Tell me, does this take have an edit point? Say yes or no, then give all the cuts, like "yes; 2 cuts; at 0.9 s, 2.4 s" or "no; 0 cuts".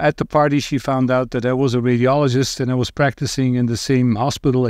no; 0 cuts